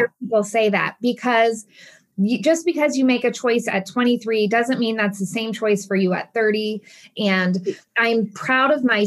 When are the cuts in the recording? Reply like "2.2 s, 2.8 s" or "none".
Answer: 2.0 s, 7.0 s